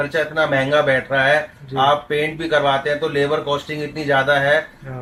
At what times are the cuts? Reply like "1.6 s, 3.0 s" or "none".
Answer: none